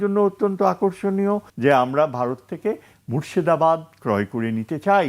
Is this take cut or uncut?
cut